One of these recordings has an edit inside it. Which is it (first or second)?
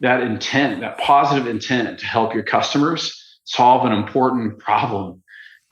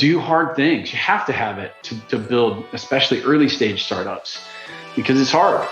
second